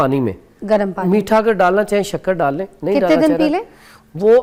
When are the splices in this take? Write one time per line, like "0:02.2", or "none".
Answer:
none